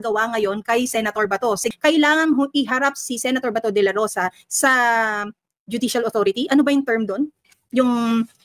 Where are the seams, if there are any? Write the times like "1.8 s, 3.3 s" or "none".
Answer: 1.7 s